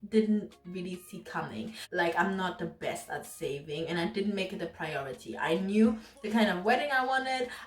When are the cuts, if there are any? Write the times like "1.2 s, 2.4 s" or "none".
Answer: 1.8 s

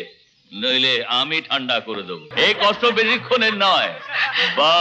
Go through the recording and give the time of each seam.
2.2 s

